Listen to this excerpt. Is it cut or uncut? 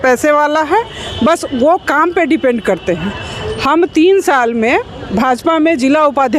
uncut